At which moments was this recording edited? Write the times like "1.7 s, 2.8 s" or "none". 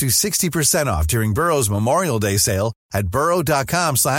none